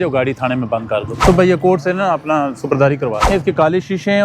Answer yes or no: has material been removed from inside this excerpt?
yes